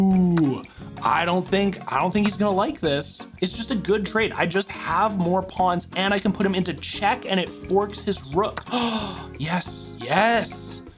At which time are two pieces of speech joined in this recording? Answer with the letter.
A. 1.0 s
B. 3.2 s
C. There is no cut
B